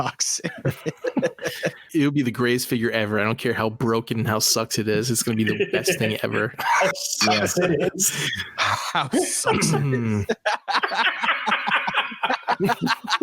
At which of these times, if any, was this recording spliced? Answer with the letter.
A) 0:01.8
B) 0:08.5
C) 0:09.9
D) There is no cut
A